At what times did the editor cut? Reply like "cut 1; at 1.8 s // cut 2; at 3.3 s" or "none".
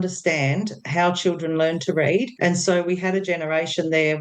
cut 1; at 2.3 s